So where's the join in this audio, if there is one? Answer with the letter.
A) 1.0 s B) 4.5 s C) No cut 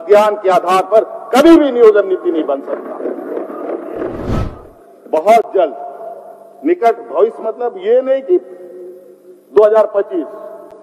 B